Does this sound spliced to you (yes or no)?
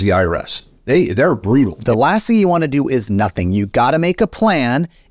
yes